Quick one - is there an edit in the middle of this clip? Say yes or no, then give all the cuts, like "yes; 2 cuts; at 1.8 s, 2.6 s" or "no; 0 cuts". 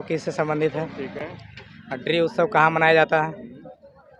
no; 0 cuts